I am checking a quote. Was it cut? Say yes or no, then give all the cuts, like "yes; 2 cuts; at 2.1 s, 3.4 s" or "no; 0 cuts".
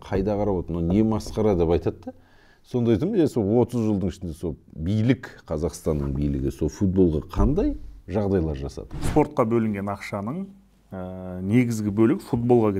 yes; 1 cut; at 8.9 s